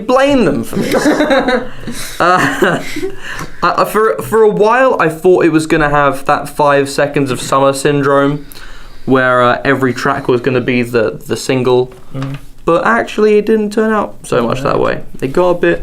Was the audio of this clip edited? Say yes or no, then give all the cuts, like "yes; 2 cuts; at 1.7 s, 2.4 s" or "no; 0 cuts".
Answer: yes; 1 cut; at 6.3 s